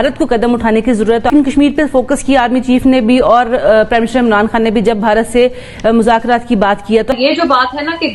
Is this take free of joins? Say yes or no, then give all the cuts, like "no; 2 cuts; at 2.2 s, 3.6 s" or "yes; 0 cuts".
no; 2 cuts; at 1.3 s, 7.1 s